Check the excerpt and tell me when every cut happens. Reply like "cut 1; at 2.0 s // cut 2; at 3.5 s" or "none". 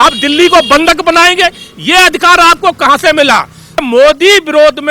cut 1; at 3.8 s